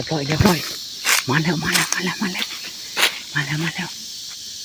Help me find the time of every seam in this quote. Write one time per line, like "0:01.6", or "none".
none